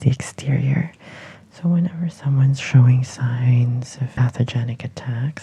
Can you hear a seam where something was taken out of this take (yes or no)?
yes